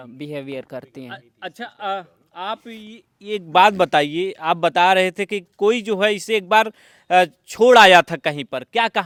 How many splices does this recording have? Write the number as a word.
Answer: zero